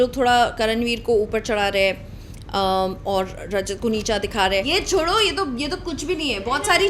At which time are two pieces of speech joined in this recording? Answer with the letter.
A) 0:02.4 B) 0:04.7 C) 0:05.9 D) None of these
B